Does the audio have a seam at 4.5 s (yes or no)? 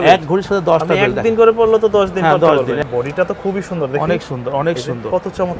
no